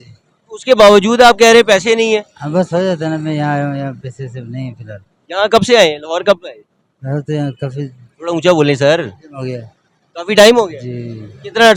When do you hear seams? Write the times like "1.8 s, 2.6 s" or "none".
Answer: none